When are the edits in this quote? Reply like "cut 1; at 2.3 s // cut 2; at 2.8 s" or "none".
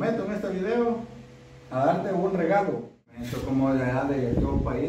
cut 1; at 3.3 s